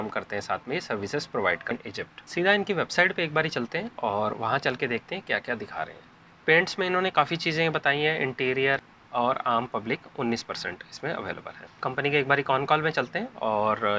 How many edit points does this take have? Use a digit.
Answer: 2